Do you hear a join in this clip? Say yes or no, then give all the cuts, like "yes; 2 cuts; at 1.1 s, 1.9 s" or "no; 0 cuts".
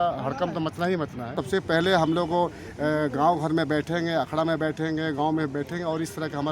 yes; 1 cut; at 1.4 s